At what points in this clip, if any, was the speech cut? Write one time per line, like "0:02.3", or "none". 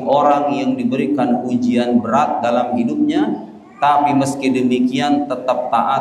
none